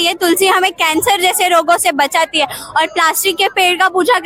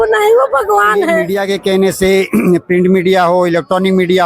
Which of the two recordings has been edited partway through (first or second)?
second